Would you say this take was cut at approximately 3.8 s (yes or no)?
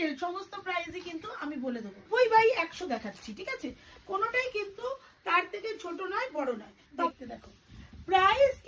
no